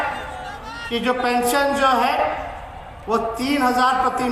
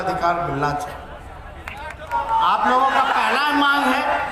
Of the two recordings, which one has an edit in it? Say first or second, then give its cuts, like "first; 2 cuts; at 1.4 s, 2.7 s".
second; 1 cut; at 2.1 s